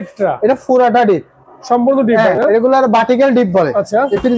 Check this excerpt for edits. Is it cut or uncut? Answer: uncut